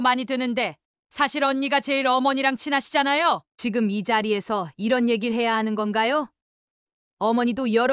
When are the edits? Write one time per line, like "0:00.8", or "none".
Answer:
0:03.5